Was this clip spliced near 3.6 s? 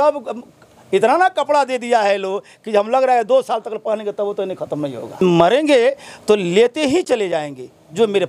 no; 1 cut; at 5.2 s

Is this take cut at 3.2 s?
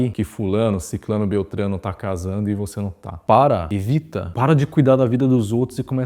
yes; 2 cuts; at 3.2 s, 4.3 s

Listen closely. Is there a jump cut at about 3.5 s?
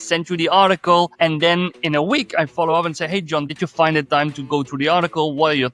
yes; 2 cuts; at 1.1 s, 3.5 s

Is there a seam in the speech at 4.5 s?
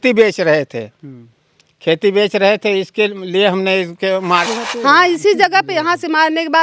yes; 1 cut; at 4.5 s

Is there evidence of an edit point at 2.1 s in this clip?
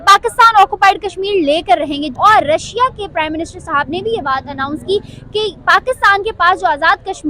yes; 1 cut; at 2.1 s

